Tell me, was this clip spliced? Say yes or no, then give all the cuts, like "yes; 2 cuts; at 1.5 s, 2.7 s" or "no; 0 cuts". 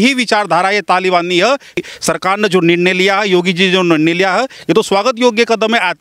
yes; 1 cut; at 1.8 s